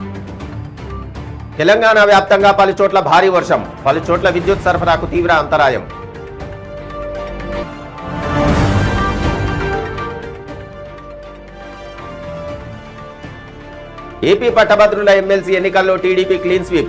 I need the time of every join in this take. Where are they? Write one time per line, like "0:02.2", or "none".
0:01.3